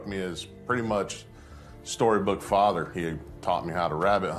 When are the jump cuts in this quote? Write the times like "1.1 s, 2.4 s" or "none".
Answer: 2.9 s